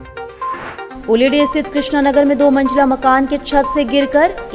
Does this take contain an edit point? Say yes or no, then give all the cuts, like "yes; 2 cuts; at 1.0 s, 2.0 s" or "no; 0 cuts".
yes; 1 cut; at 0.9 s